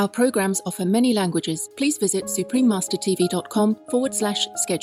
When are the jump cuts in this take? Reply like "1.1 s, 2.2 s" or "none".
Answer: 1.6 s, 3.8 s